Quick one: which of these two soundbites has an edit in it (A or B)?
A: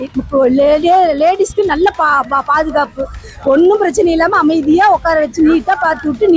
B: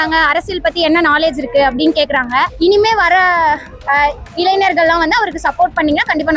B